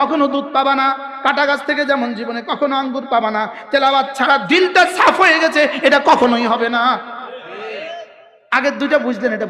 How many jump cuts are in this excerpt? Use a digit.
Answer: 0